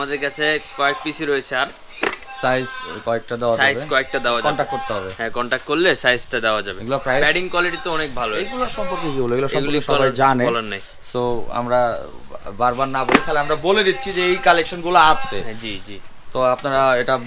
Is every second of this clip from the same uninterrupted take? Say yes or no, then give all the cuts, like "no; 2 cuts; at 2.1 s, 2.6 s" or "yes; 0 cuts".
yes; 0 cuts